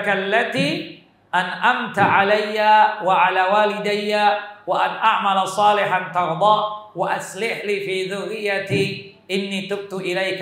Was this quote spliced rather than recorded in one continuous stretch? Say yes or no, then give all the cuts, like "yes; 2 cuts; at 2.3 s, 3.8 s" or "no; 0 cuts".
no; 0 cuts